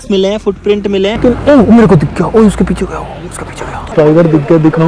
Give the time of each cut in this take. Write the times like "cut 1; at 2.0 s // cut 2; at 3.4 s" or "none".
cut 1; at 1.2 s // cut 2; at 3.9 s